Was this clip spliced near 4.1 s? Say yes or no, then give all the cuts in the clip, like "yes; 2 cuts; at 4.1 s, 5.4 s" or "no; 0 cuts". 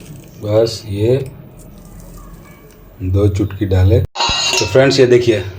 yes; 1 cut; at 4.1 s